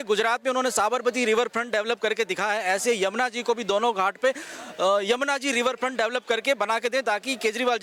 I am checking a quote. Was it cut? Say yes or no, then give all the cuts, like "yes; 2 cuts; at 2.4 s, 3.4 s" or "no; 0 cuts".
no; 0 cuts